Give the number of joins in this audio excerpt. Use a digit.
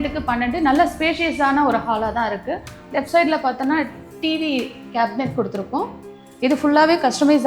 1